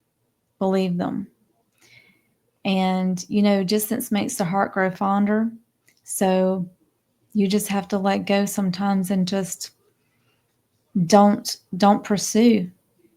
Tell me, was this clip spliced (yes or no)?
no